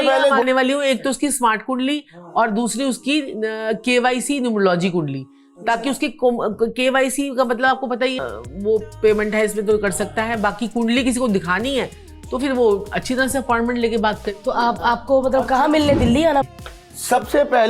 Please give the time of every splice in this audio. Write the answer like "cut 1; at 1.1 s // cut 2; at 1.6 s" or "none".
cut 1; at 8.3 s // cut 2; at 16.5 s